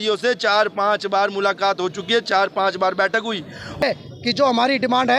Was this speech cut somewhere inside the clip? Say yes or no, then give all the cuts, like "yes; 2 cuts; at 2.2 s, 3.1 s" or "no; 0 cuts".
yes; 1 cut; at 3.8 s